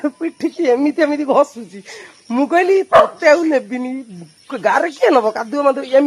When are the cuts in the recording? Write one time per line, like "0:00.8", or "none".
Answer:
none